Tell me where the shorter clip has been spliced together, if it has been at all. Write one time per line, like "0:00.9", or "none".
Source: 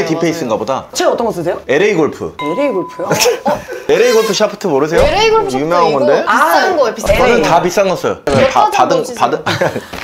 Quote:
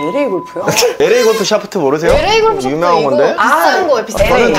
0:00.9